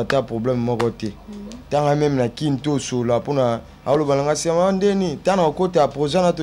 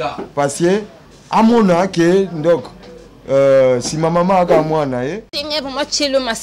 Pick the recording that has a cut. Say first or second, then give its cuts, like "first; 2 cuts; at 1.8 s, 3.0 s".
second; 1 cut; at 5.4 s